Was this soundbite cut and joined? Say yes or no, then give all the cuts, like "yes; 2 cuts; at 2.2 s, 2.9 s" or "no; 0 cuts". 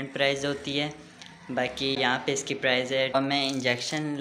yes; 2 cuts; at 2.0 s, 3.1 s